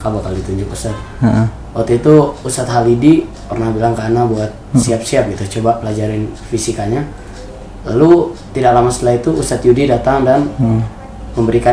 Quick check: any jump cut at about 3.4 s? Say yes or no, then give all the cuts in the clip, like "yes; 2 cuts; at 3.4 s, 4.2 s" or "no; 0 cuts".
no; 0 cuts